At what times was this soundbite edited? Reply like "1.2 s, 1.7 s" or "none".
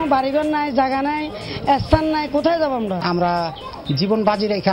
3.0 s